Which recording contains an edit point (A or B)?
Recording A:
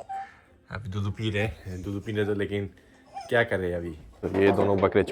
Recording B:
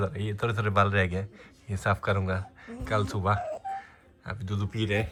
A